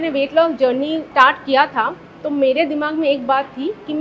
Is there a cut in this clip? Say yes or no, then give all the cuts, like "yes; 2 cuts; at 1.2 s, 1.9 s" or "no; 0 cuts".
yes; 1 cut; at 1.0 s